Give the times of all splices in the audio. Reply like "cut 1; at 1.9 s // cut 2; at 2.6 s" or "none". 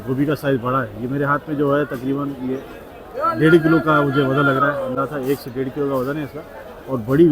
none